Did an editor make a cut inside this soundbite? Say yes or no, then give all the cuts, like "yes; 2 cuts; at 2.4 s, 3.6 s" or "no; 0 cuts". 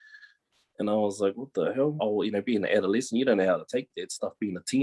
yes; 1 cut; at 2.0 s